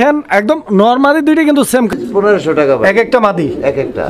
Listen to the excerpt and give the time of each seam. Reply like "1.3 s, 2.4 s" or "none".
1.9 s

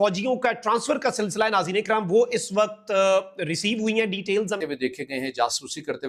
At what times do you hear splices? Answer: 4.6 s

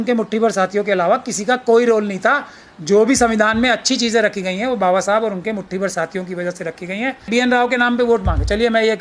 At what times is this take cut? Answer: 7.3 s

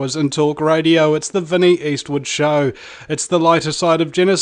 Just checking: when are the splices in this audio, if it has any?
1.5 s

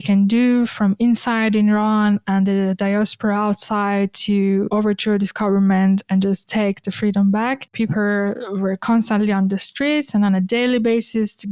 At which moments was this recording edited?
7.8 s

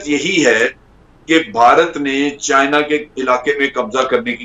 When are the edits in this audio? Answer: none

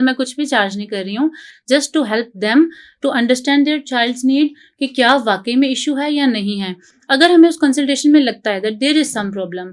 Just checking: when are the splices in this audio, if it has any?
none

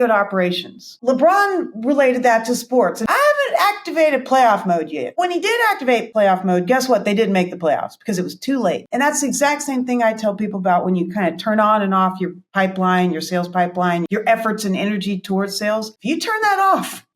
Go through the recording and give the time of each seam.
1.0 s, 3.1 s

